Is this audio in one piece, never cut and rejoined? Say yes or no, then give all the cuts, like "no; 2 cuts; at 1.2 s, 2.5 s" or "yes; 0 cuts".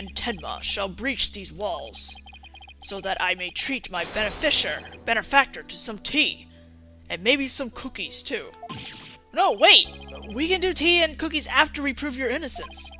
yes; 0 cuts